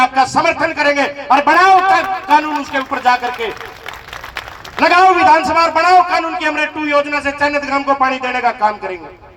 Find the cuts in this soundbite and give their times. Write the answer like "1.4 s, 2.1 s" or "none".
none